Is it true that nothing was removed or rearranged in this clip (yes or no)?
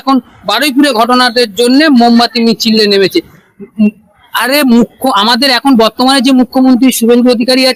yes